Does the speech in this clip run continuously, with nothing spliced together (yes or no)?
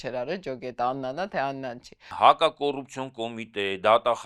no